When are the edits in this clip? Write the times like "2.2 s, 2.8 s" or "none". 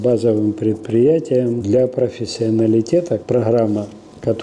1.6 s